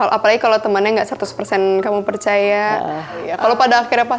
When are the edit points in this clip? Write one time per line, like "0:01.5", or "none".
0:03.3